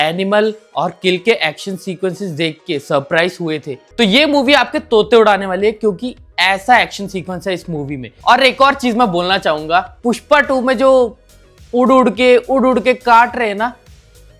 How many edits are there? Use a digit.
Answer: 1